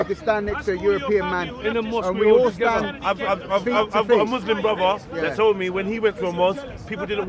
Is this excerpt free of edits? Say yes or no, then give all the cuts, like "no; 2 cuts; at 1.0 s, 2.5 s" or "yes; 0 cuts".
yes; 0 cuts